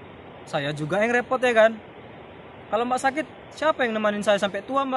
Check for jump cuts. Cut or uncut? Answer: uncut